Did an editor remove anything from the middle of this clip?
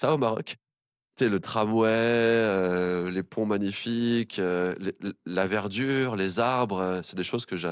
no; 0 cuts

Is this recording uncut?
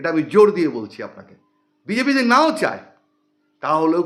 yes; 0 cuts

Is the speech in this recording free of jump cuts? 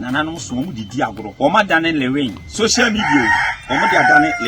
no; 2 cuts; at 1.2 s, 2.4 s

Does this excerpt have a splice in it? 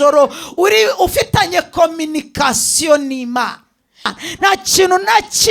yes; 1 cut; at 4.1 s

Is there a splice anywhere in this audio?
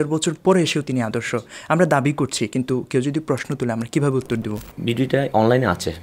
yes; 1 cut; at 4.7 s

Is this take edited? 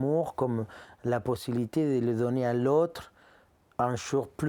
no; 0 cuts

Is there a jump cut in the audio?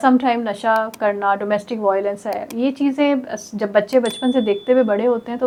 no; 0 cuts

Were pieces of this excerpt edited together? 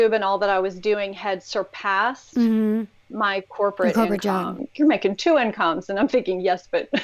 yes; 1 cut; at 4.6 s

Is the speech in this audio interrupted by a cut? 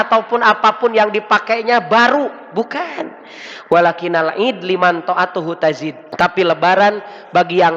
yes; 1 cut; at 6.0 s

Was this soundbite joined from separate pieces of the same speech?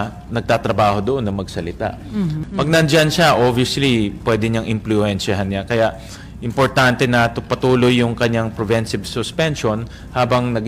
yes; 1 cut; at 2.4 s

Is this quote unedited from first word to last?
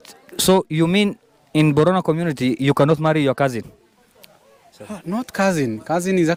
yes; 0 cuts

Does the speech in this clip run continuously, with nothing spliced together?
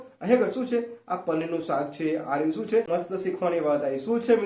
no; 1 cut; at 2.9 s

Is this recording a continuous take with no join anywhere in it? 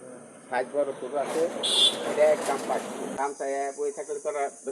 no; 1 cut; at 3.1 s

